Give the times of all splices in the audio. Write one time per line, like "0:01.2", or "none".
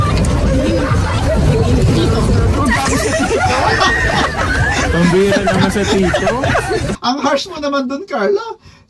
0:07.0